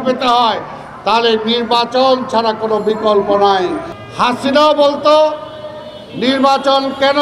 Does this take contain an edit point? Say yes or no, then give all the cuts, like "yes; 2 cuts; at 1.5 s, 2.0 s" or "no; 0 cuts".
yes; 1 cut; at 3.8 s